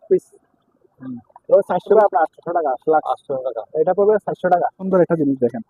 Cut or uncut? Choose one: cut